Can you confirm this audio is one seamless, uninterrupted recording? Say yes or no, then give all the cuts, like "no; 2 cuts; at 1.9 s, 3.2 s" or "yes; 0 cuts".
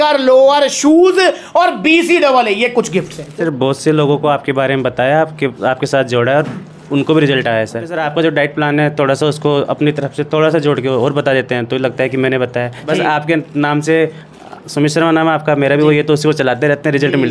no; 3 cuts; at 3.2 s, 7.9 s, 12.9 s